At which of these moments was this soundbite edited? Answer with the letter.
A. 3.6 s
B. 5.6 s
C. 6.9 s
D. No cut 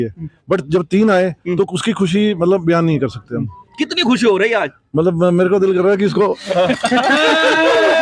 D